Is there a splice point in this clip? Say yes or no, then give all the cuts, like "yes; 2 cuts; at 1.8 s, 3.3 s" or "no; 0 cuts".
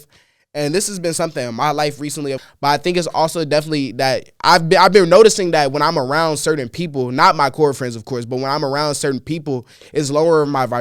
yes; 1 cut; at 2.4 s